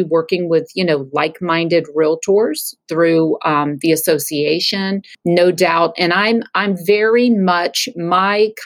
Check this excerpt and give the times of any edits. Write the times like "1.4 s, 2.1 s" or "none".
5.1 s